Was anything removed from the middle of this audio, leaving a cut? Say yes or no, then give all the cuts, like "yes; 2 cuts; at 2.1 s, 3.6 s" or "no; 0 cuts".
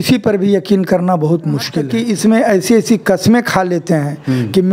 yes; 1 cut; at 1.8 s